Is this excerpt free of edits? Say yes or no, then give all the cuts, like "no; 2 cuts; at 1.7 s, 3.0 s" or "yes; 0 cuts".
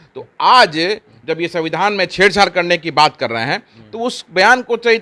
yes; 0 cuts